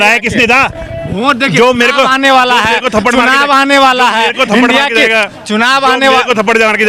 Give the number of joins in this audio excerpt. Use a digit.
0